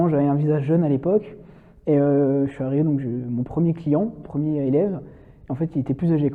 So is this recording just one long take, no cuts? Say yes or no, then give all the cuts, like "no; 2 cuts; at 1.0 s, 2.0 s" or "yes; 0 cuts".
yes; 0 cuts